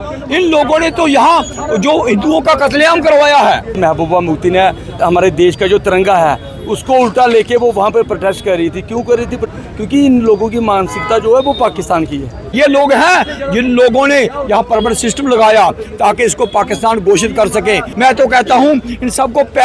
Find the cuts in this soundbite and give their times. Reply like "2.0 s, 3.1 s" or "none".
3.7 s, 4.9 s, 9.5 s, 12.4 s, 17.9 s